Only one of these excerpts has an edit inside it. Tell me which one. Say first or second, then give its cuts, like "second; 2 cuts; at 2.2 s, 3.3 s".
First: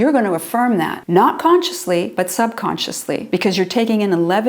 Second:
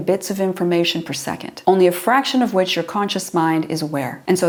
first; 2 cuts; at 1.0 s, 2.1 s